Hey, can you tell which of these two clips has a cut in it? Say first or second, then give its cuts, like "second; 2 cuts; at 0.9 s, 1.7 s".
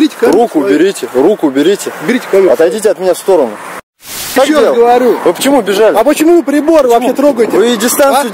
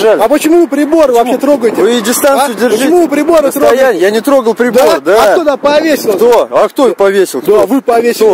first; 1 cut; at 4.4 s